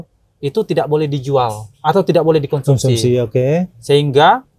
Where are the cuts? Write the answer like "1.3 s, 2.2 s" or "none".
none